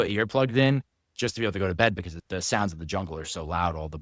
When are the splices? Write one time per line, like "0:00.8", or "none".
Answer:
0:02.1